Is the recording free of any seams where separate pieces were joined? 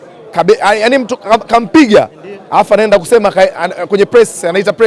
yes; 0 cuts

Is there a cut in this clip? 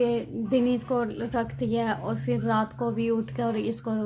no; 0 cuts

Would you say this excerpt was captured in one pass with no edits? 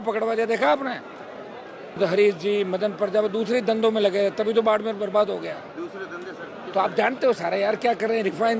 no; 1 cut; at 2.0 s

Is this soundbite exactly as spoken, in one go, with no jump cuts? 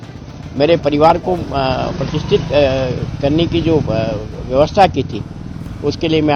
yes; 0 cuts

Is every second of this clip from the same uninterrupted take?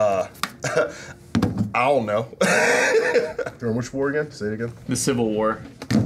no; 1 cut; at 3.5 s

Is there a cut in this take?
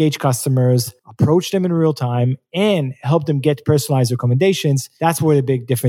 yes; 2 cuts; at 1.0 s, 4.9 s

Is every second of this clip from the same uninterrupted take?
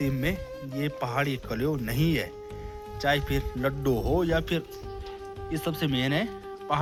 yes; 0 cuts

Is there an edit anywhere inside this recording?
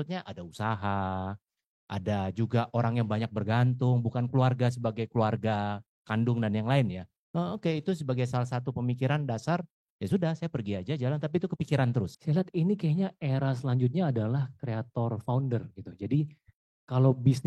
yes; 1 cut; at 12.1 s

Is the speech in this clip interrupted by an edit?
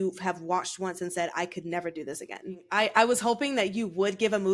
yes; 1 cut; at 2.6 s

